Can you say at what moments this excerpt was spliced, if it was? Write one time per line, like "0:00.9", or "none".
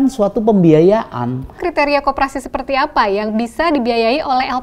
0:01.6